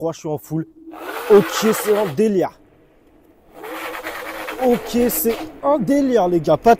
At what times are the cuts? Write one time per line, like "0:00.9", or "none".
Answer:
none